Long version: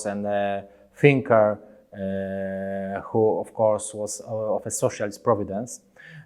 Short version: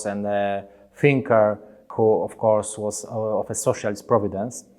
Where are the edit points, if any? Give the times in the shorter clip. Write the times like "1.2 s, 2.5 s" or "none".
1.8 s